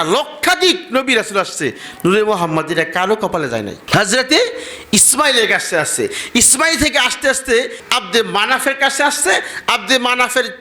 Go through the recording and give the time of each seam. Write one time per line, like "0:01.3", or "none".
0:03.8
0:07.8